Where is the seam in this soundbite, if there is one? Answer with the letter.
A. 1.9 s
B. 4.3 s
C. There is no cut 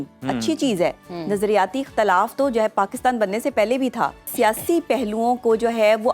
B